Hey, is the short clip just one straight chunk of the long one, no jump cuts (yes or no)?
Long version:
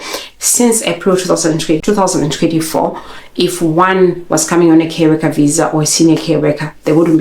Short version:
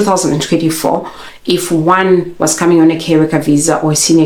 yes